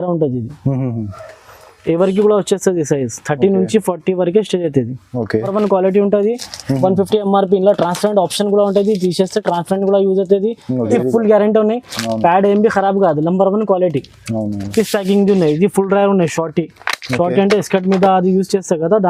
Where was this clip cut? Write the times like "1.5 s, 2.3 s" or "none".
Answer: 5.5 s, 10.9 s, 14.6 s